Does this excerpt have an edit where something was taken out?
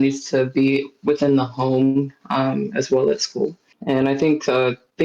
yes; 1 cut; at 3.7 s

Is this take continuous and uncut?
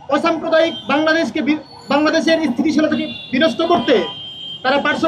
yes; 0 cuts

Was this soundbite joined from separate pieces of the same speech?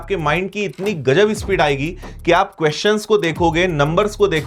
no; 0 cuts

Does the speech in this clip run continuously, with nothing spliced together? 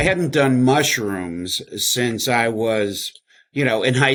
yes; 0 cuts

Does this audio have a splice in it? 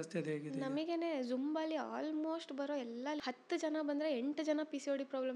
yes; 1 cut; at 3.2 s

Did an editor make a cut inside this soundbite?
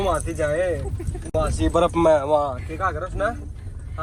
no; 0 cuts

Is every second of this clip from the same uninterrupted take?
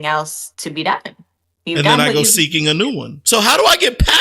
no; 1 cut; at 3.1 s

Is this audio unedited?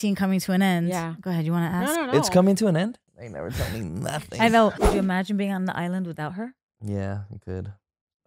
no; 2 cuts; at 3.0 s, 4.7 s

